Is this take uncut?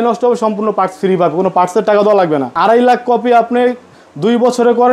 no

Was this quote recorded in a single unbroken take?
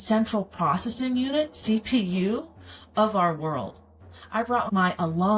yes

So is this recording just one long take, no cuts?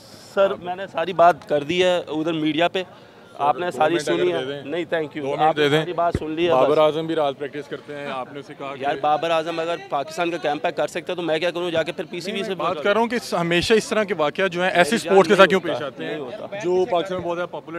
yes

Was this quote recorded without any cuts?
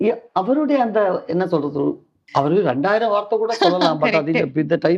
no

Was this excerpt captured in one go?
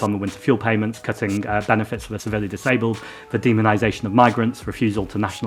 no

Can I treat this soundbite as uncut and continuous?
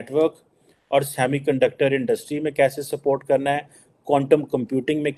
yes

